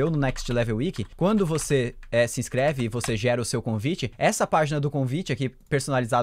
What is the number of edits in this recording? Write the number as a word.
two